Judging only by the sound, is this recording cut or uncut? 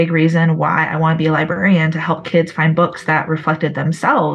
uncut